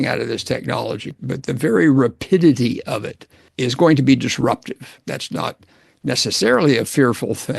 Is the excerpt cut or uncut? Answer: cut